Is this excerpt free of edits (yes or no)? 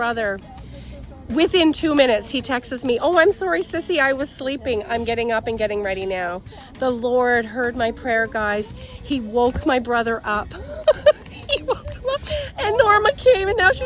yes